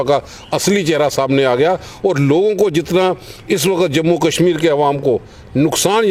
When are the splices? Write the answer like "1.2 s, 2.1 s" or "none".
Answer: none